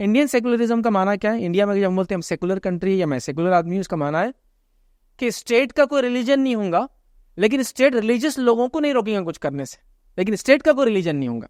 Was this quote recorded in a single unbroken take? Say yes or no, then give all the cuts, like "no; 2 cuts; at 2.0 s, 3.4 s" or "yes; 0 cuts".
yes; 0 cuts